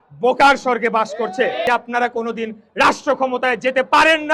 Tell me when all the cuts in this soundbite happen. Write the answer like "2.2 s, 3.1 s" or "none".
1.6 s